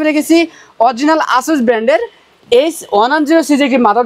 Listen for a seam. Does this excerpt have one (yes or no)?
no